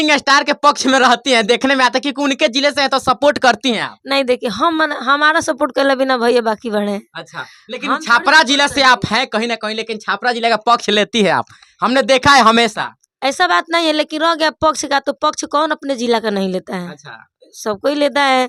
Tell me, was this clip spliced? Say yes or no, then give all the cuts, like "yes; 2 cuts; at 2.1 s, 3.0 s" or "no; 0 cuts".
no; 0 cuts